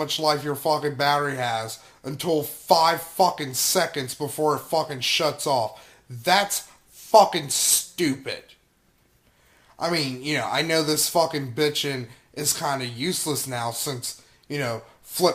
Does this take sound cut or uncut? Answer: uncut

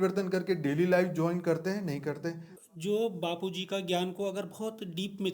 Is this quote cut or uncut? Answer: cut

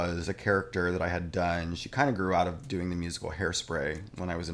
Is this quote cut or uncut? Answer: uncut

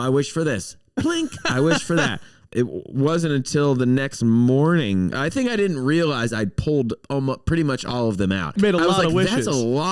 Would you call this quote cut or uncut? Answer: cut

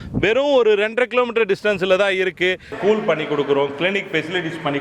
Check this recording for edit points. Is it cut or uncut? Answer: cut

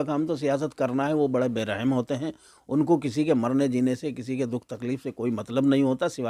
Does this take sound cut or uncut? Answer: uncut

